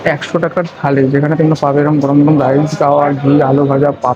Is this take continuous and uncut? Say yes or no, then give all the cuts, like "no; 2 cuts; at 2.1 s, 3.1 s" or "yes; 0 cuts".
yes; 0 cuts